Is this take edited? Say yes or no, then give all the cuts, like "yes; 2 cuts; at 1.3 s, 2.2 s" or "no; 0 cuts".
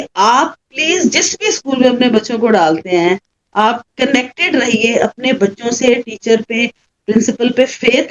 no; 0 cuts